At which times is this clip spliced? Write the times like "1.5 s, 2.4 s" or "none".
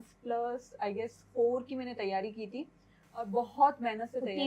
none